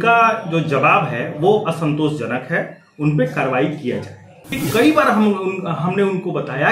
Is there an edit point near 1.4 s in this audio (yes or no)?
no